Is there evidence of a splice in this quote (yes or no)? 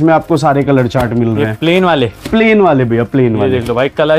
no